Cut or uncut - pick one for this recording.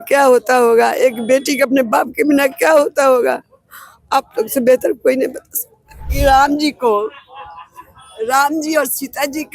cut